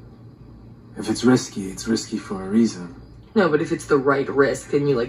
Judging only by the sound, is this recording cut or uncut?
uncut